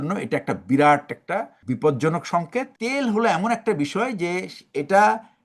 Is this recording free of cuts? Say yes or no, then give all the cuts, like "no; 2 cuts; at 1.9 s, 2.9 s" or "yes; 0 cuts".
no; 2 cuts; at 1.6 s, 2.7 s